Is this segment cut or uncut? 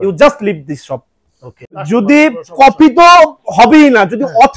cut